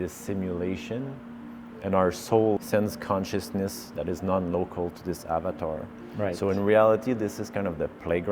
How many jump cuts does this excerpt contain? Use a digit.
1